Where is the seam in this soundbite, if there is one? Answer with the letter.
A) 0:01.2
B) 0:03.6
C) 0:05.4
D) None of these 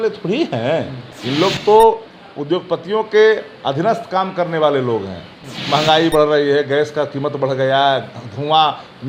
A